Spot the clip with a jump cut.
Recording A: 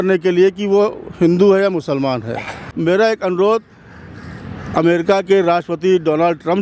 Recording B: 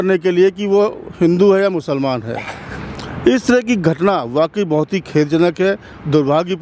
A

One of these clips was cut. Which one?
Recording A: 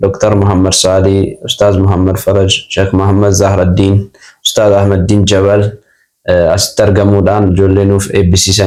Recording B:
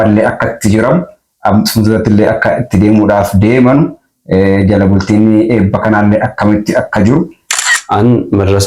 B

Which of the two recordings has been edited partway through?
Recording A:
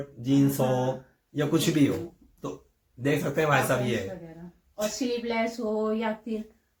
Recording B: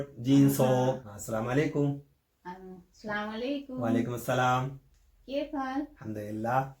B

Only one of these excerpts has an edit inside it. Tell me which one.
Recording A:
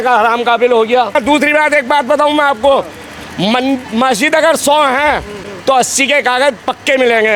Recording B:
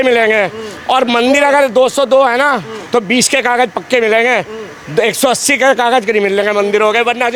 A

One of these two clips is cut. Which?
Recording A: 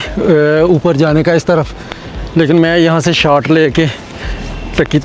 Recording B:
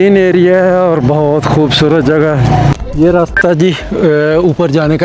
B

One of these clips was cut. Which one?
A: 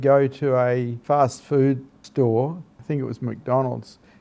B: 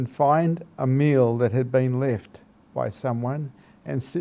A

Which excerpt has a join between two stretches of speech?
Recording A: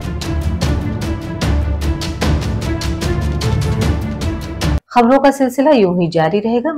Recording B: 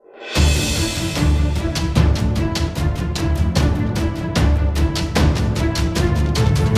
A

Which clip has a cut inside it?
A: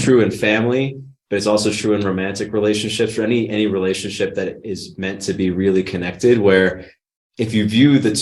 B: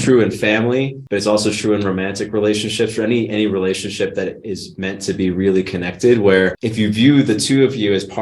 B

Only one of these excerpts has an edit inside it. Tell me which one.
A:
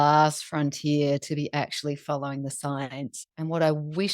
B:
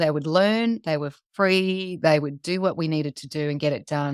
A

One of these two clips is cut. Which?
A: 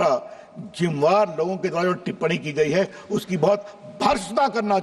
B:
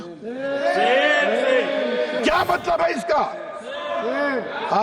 B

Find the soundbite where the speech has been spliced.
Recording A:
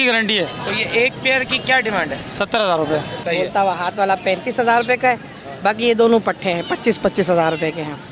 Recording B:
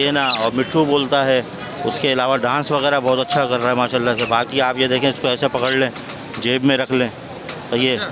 A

